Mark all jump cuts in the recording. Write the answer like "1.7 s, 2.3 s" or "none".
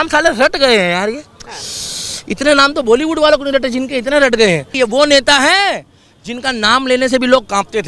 4.7 s